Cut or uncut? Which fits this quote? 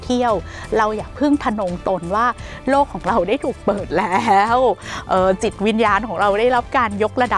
uncut